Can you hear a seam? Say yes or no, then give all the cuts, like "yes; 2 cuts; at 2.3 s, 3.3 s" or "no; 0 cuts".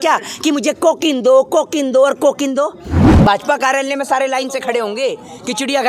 yes; 1 cut; at 3.1 s